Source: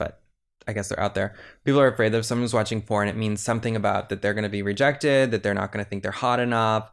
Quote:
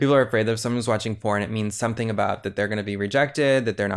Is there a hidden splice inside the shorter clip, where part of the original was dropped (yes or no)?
no